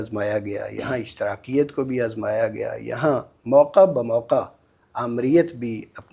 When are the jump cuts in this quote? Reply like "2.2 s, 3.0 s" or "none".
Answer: none